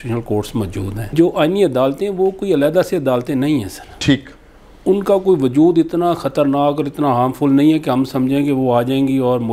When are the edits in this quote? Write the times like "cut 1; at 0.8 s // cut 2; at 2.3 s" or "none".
cut 1; at 1.1 s